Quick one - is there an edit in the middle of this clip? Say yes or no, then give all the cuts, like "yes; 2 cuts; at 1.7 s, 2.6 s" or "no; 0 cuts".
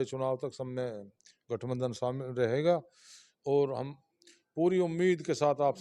no; 0 cuts